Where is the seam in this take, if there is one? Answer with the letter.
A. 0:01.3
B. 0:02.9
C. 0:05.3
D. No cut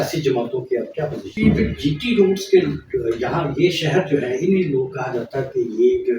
A